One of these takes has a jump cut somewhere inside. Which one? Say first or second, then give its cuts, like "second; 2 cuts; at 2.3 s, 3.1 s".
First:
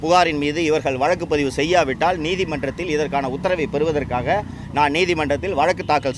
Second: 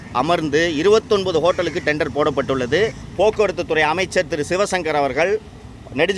second; 1 cut; at 3.0 s